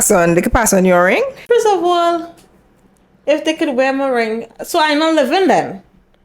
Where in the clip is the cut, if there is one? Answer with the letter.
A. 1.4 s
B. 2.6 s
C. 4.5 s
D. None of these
A